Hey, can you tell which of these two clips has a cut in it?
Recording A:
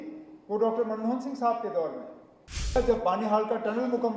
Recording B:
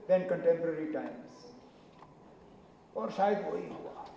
A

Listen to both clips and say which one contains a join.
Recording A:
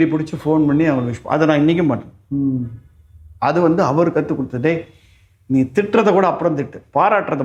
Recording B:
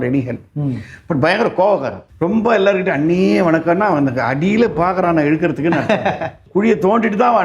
B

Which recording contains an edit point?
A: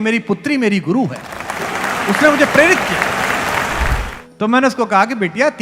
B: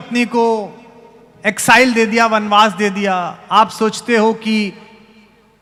A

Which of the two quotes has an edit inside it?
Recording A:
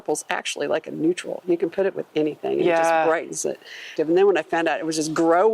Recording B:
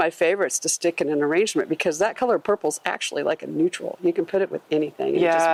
A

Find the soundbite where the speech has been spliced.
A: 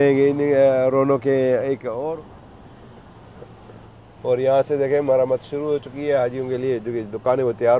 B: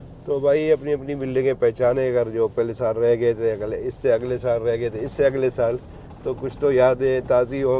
A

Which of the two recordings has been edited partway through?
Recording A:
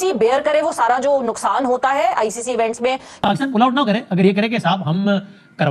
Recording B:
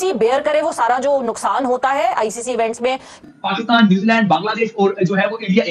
B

